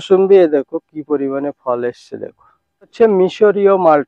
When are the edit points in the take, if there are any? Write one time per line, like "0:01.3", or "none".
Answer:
0:02.9